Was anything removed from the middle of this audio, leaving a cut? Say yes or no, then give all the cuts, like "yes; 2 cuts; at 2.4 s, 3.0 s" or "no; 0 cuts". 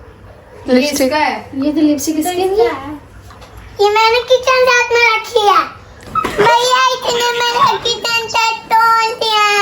yes; 1 cut; at 6.0 s